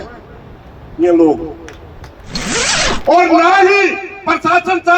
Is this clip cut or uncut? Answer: cut